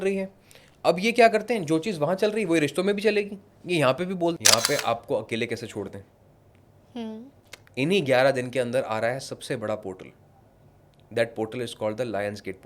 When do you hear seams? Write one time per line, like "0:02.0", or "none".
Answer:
0:04.4